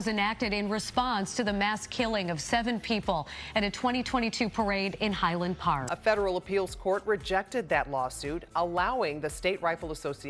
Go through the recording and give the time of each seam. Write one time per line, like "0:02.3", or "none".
none